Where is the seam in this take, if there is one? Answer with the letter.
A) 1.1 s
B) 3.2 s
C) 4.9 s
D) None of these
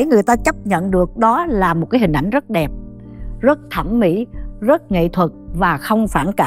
D